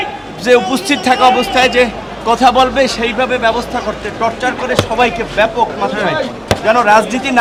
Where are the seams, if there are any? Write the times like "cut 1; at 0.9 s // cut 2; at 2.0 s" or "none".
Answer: none